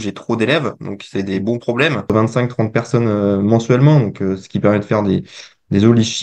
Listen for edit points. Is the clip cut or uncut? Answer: cut